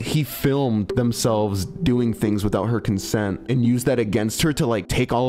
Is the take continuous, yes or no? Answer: yes